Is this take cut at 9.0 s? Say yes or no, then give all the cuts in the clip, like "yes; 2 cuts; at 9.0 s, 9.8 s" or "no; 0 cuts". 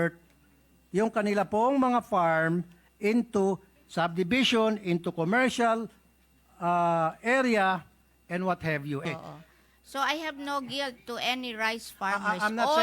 yes; 1 cut; at 9.0 s